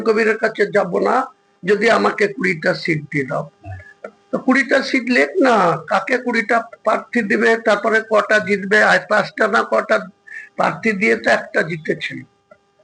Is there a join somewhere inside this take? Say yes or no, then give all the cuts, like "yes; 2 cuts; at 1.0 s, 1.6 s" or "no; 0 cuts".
no; 0 cuts